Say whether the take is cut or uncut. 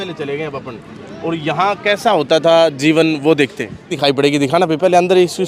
cut